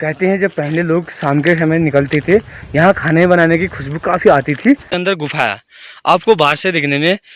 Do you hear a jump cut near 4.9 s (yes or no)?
yes